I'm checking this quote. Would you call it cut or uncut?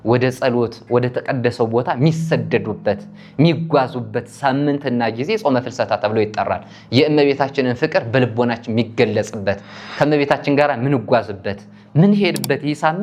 uncut